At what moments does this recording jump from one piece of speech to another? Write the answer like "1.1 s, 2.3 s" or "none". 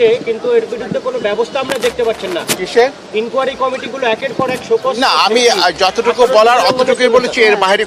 none